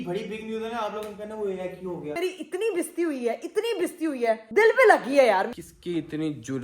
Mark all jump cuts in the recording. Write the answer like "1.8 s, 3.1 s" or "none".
2.2 s, 4.4 s, 5.5 s